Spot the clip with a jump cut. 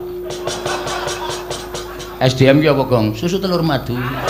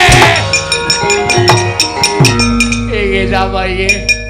second; 1 cut; at 2.3 s

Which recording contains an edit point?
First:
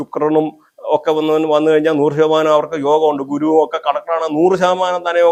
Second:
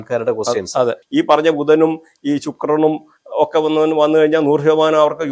second; 1 cut; at 1.0 s

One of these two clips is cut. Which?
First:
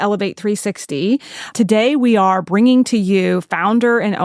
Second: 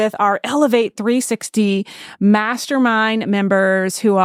first; 1 cut; at 1.5 s

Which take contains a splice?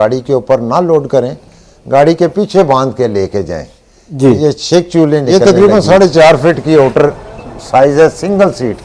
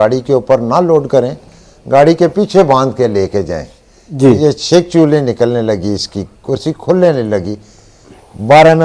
first; 1 cut; at 5.3 s

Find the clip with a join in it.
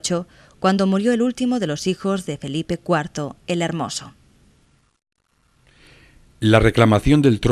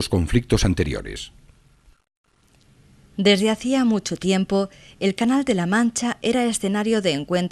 second; 1 cut; at 2.8 s

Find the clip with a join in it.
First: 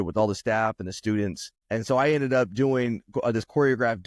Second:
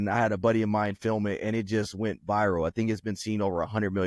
first; 1 cut; at 1.5 s

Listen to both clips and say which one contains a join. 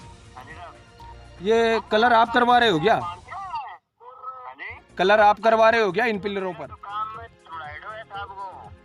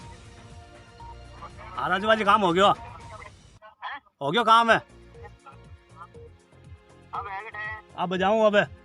first; 2 cuts; at 1.4 s, 6.5 s

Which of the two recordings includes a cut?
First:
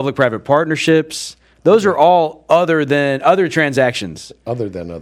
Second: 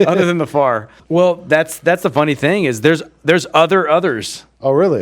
second; 1 cut; at 0.9 s

